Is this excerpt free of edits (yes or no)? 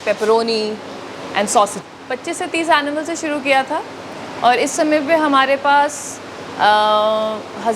no